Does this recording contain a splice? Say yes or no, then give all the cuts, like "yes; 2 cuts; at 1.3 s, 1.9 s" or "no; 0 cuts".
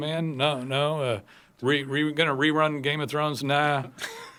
no; 0 cuts